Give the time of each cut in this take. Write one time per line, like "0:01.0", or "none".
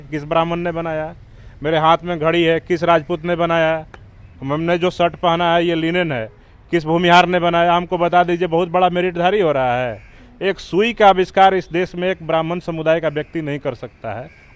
none